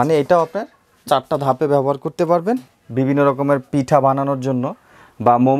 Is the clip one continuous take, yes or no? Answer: no